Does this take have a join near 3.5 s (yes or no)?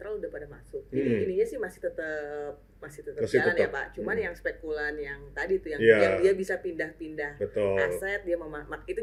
no